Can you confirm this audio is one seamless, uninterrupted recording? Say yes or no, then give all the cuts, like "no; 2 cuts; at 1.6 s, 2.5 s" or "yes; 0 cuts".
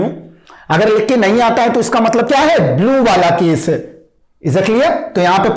no; 1 cut; at 2.3 s